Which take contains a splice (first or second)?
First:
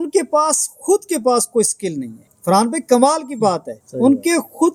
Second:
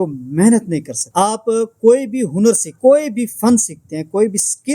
second